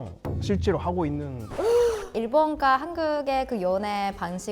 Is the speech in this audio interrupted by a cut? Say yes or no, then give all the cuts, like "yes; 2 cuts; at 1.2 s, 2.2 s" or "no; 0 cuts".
yes; 2 cuts; at 1.4 s, 2.1 s